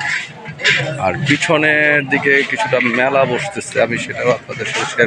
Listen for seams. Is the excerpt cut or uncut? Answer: uncut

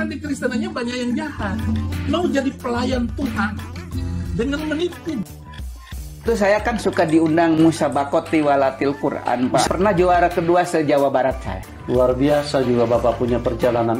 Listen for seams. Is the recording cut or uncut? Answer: uncut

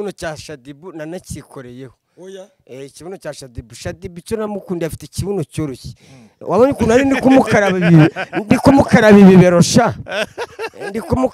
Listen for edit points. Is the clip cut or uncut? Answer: uncut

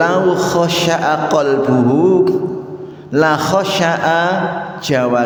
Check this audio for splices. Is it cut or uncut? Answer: uncut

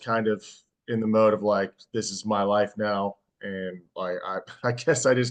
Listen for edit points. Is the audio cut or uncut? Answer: uncut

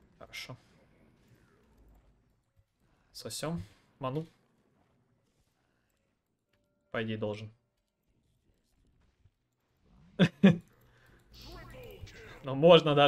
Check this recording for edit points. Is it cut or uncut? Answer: cut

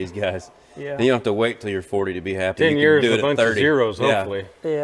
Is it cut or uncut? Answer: uncut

